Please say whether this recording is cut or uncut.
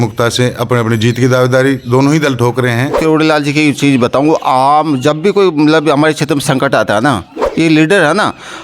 cut